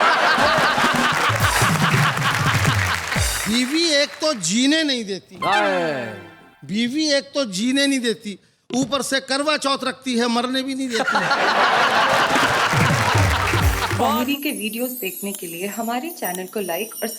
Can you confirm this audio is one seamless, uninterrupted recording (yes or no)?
no